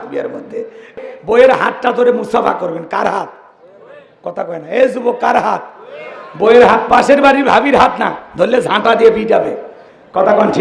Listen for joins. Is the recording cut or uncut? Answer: cut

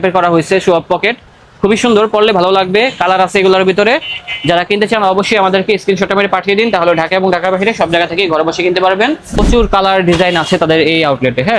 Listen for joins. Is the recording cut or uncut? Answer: cut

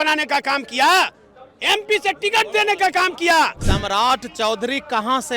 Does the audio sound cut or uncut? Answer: cut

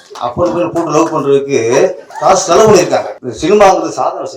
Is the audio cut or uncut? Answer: cut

